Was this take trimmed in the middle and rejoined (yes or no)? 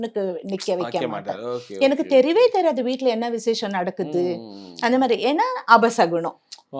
no